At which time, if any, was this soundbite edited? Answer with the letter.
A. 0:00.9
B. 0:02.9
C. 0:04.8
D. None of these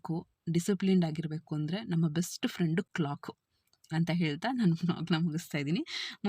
D